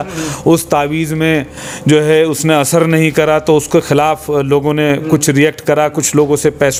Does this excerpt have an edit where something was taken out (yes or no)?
no